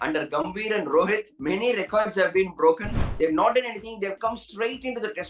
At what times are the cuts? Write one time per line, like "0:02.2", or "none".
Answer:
0:03.0